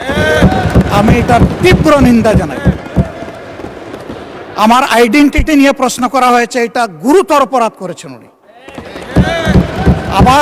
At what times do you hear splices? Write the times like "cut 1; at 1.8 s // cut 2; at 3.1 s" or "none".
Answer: none